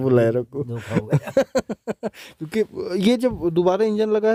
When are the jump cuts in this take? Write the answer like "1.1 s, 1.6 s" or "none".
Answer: none